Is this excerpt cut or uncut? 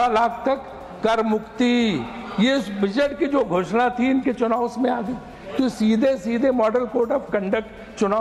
uncut